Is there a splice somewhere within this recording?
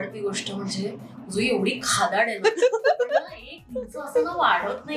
no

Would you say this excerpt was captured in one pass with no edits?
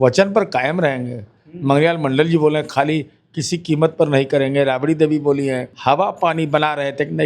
no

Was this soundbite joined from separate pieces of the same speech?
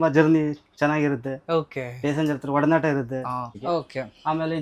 yes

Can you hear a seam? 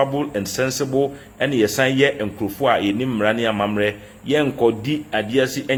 no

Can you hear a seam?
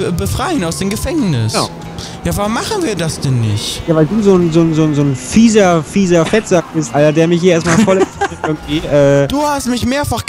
no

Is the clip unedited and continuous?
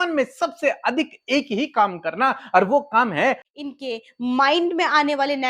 no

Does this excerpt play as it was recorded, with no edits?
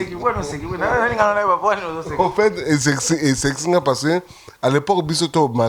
yes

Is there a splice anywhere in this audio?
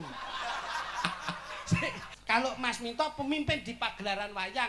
yes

